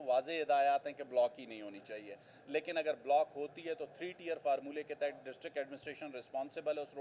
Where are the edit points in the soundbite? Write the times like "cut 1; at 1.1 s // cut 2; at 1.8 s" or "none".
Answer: none